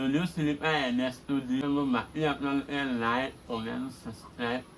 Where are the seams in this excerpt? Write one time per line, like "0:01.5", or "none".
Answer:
0:01.6